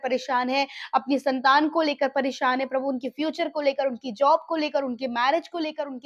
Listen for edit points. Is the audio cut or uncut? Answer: uncut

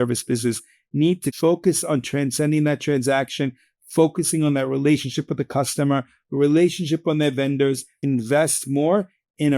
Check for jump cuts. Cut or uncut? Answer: cut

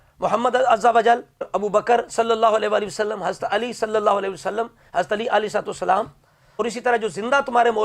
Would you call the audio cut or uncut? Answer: cut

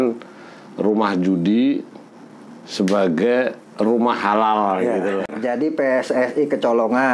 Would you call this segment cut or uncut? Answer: cut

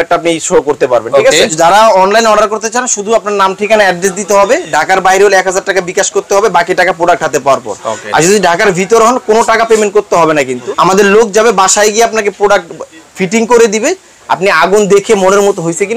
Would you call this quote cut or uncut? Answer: cut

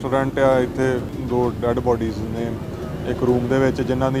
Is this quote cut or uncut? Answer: cut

